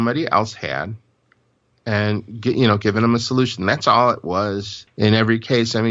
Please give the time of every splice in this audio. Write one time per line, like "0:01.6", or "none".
0:04.8